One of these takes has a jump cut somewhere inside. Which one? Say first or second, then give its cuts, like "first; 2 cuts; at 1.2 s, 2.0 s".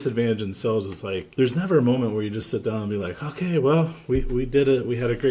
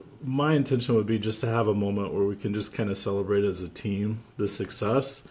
first; 1 cut; at 1.2 s